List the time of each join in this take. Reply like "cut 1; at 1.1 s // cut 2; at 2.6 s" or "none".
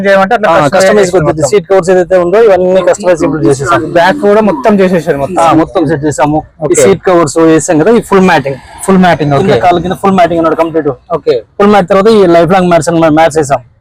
none